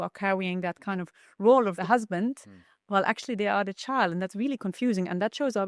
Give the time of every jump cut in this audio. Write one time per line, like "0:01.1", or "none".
0:01.8